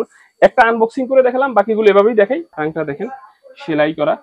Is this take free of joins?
no; 1 cut; at 2.5 s

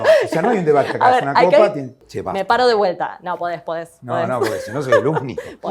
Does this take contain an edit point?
yes; 1 cut; at 1.9 s

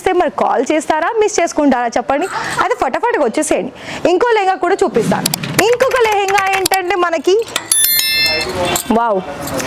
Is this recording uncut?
yes; 0 cuts

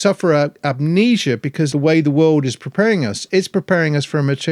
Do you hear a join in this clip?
yes; 1 cut; at 1.7 s

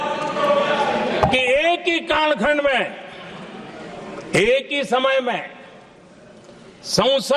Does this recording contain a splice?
no; 0 cuts

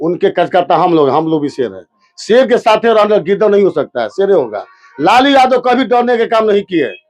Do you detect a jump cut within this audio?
no; 0 cuts

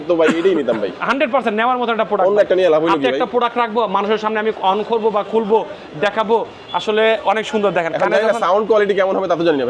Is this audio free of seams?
yes; 0 cuts

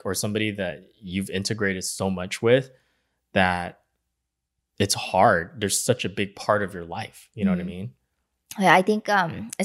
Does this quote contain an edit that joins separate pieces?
no; 0 cuts

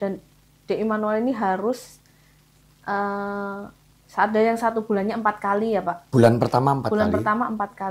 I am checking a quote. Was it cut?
no; 0 cuts

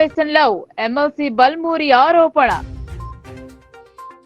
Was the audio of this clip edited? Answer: yes; 1 cut; at 2.6 s

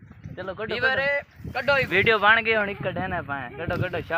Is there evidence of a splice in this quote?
no; 0 cuts

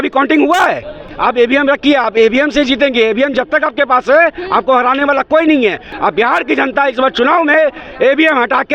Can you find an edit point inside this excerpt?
yes; 2 cuts; at 1.1 s, 5.9 s

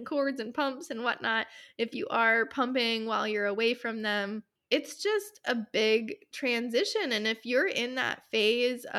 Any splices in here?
yes; 1 cut; at 4.5 s

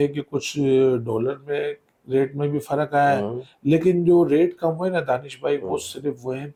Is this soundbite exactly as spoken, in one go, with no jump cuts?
yes; 0 cuts

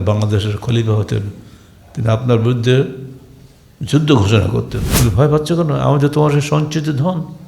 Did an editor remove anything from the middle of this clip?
yes; 1 cut; at 4.8 s

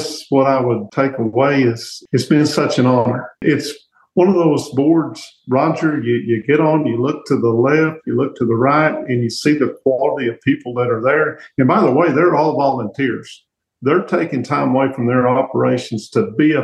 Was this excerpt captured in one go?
no; 3 cuts; at 0.9 s, 1.9 s, 3.4 s

